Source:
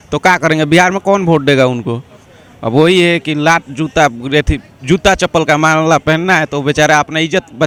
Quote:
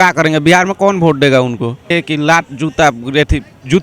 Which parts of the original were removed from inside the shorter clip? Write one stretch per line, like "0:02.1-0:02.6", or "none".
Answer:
0:02.2-0:03.1